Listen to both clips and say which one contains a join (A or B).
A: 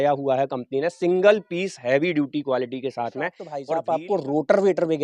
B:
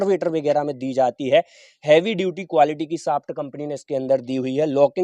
A